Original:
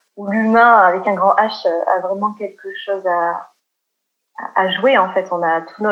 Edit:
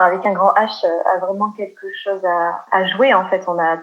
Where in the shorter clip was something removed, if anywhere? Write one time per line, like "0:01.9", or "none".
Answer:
0:02.6